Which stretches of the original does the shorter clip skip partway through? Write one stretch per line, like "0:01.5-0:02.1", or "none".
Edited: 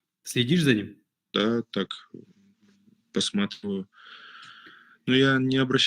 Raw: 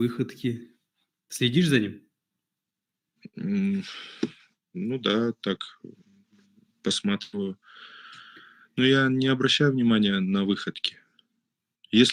0:02.4-0:05.0